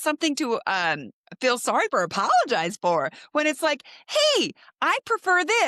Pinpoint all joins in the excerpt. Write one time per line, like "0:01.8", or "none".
none